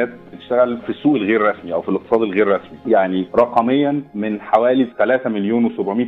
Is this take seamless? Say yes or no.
no